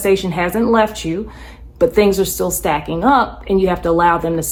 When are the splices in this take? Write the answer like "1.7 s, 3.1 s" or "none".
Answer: none